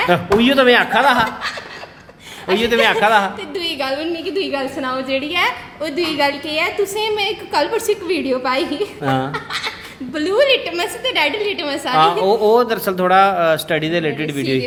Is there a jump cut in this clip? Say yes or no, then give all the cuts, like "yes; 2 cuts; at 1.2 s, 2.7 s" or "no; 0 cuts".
no; 0 cuts